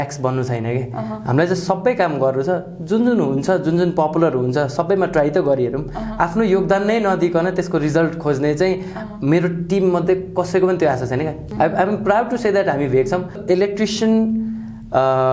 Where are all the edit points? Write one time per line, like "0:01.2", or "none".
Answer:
0:11.4
0:13.4